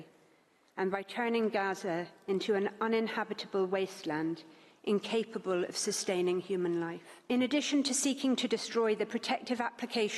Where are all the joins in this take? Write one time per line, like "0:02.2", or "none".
0:07.1